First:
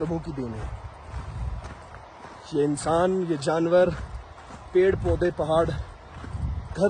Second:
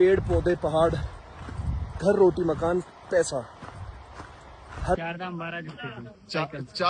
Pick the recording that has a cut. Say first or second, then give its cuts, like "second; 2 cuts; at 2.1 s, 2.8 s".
second; 1 cut; at 5.0 s